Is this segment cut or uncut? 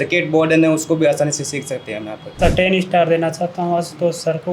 cut